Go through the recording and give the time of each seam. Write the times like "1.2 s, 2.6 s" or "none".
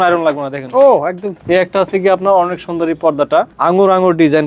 1.3 s, 3.5 s